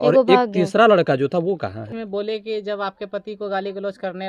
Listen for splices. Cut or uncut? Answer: cut